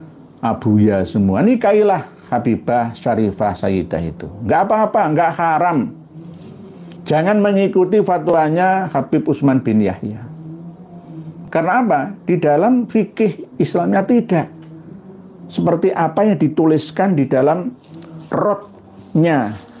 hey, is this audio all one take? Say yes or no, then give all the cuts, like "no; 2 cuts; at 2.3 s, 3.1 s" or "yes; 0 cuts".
yes; 0 cuts